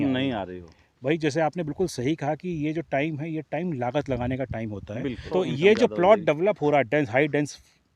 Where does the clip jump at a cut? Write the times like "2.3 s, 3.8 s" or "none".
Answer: 5.3 s

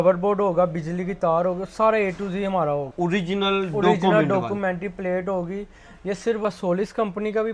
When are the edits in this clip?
2.9 s, 6.4 s

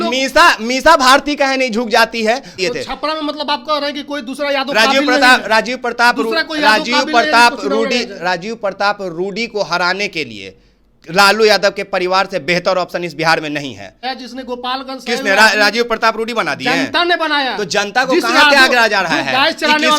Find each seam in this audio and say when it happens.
2.6 s, 14.0 s

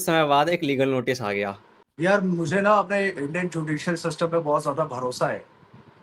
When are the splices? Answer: 1.7 s

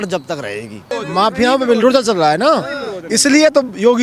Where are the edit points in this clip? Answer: 0.9 s

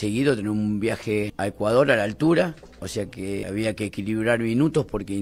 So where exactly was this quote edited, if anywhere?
1.3 s, 3.4 s

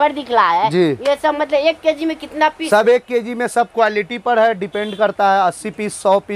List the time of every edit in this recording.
none

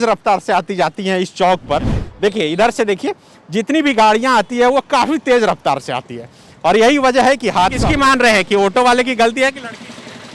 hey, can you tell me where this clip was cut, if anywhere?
2.0 s, 7.8 s

